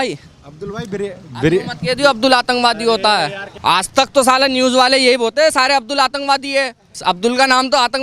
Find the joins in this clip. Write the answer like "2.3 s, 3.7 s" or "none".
3.5 s, 6.8 s